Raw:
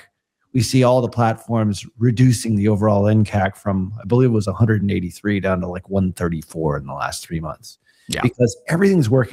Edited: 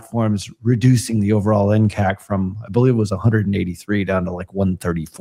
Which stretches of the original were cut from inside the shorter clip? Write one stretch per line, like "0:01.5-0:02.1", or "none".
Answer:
none

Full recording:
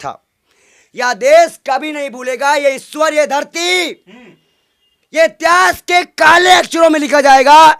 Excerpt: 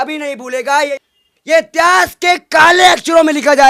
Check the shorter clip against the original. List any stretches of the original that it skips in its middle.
0:02.7-0:04.6

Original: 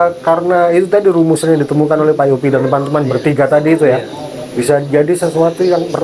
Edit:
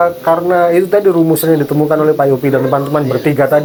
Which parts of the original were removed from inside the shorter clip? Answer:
none

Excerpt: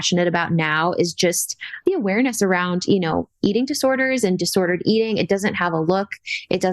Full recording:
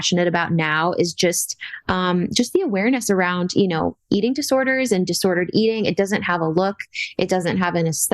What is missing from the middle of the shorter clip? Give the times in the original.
0:01.8-0:02.5

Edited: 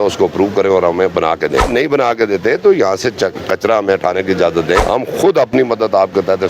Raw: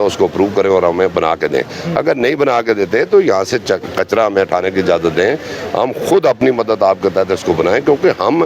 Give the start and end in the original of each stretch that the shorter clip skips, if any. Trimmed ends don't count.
0:01.7-0:02.2
0:05.3-0:05.7

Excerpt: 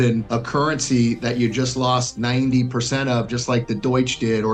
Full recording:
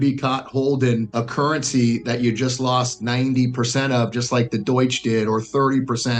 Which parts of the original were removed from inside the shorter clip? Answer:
none

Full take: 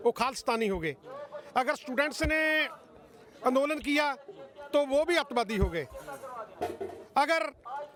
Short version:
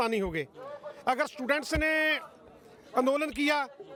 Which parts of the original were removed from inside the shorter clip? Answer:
none

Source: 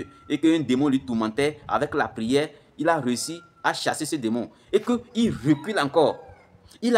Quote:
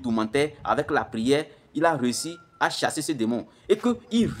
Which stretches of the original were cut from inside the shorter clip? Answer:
none

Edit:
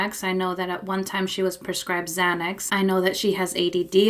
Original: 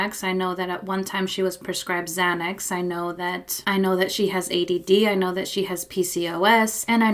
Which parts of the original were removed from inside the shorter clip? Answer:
0:02.6-0:03.5

